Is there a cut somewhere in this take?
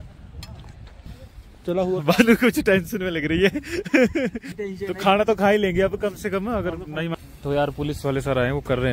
yes; 3 cuts; at 1.0 s, 4.5 s, 7.1 s

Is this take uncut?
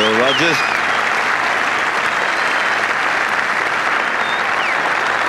no; 3 cuts; at 1.5 s, 2.7 s, 4.3 s

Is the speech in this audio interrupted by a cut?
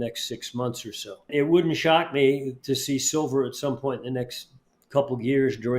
yes; 1 cut; at 1.3 s

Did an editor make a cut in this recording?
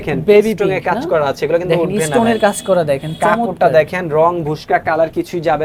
no; 0 cuts

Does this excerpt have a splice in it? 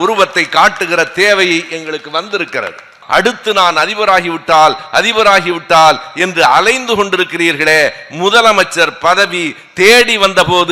yes; 1 cut; at 3.0 s

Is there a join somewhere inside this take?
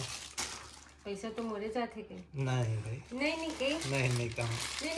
no; 0 cuts

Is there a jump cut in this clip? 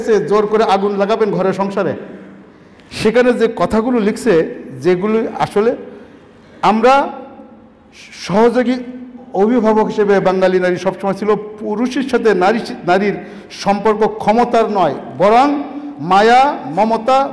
no; 0 cuts

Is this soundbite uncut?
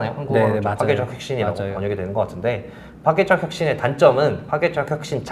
yes; 0 cuts

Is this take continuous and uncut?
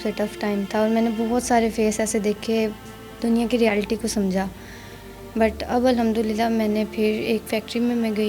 yes; 0 cuts

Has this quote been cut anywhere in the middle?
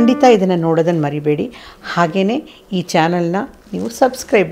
no; 0 cuts

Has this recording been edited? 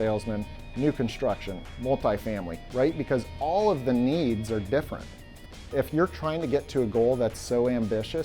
yes; 1 cut; at 5.5 s

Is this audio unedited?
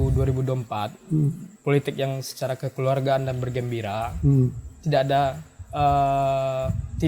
yes; 0 cuts

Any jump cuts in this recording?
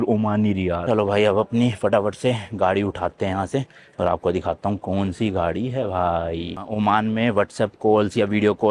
yes; 2 cuts; at 0.8 s, 6.6 s

